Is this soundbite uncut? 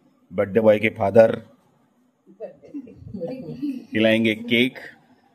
yes; 0 cuts

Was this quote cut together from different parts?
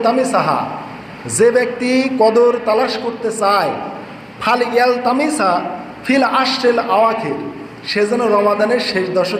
no; 0 cuts

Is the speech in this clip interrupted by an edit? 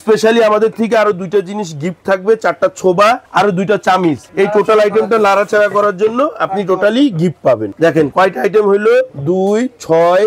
no; 0 cuts

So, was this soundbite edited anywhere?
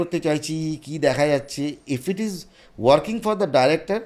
no; 0 cuts

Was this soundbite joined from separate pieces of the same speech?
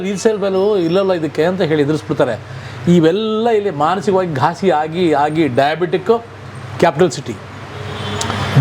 no; 0 cuts

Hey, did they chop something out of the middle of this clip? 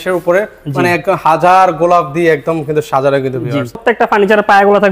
yes; 1 cut; at 3.8 s

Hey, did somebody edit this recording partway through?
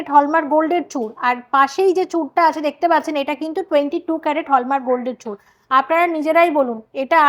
no; 0 cuts

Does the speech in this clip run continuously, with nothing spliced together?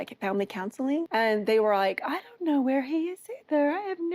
no; 1 cut; at 1.1 s

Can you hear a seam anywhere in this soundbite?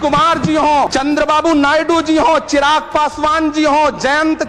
yes; 1 cut; at 0.9 s

